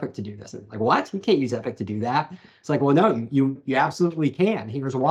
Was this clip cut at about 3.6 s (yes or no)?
yes